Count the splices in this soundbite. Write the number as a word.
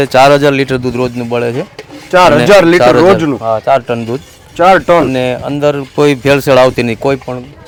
zero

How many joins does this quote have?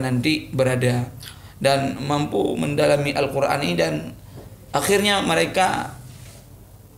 zero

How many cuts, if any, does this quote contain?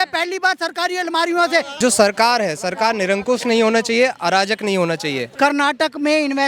two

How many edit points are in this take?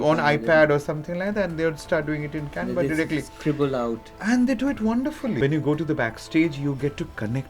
one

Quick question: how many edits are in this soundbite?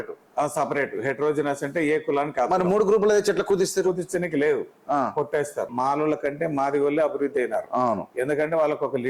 one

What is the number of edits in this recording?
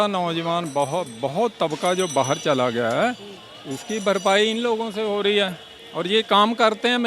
zero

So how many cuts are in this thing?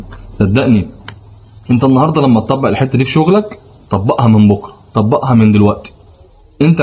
zero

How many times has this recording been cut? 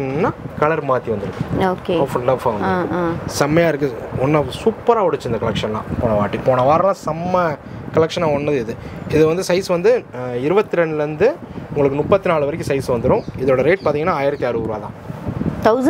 zero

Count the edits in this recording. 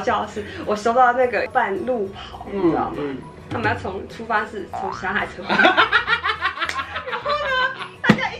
one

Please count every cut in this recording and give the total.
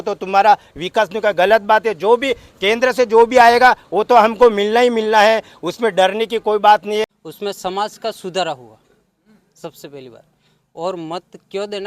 one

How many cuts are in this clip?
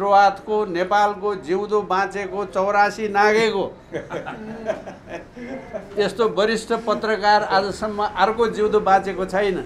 zero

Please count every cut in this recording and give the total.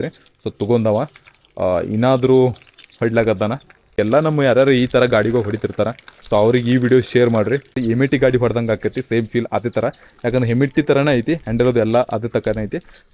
two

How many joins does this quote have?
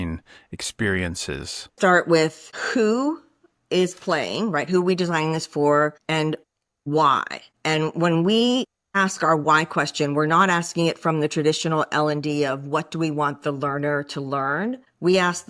one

